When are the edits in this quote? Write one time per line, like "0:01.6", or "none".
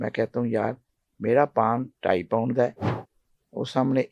none